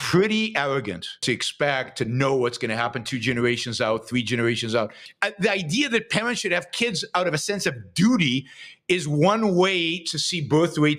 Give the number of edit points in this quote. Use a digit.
2